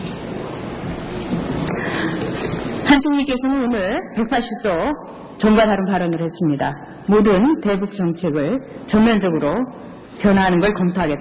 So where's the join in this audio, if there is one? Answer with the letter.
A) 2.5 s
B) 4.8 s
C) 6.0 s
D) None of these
D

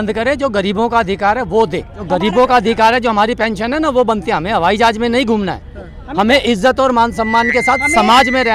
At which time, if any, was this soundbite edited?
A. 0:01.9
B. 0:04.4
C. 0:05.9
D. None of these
A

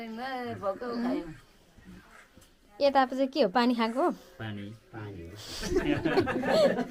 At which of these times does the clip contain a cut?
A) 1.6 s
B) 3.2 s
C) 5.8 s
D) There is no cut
D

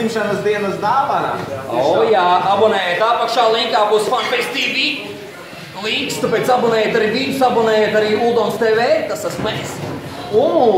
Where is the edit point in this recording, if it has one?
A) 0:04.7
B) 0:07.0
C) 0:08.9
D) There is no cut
B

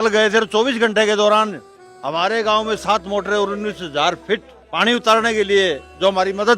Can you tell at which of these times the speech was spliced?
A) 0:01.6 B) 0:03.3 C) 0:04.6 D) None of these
C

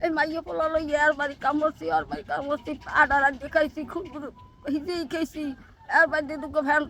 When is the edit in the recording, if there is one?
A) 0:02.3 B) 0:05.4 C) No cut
C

